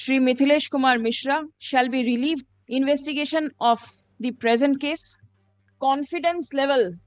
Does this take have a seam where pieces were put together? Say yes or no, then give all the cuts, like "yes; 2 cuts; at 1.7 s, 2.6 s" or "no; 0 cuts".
yes; 3 cuts; at 1.6 s, 2.5 s, 5.7 s